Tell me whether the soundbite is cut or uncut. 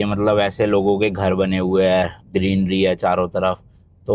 uncut